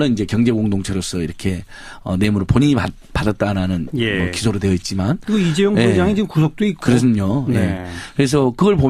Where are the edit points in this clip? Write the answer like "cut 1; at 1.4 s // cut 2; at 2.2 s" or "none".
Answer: none